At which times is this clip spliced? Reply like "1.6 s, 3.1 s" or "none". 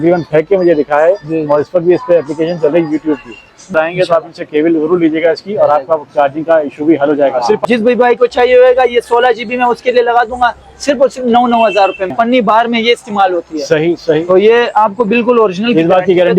3.8 s, 7.6 s, 12.1 s